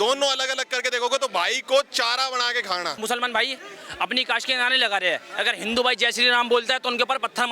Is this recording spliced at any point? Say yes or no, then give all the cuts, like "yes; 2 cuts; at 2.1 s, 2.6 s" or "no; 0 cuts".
yes; 1 cut; at 3.0 s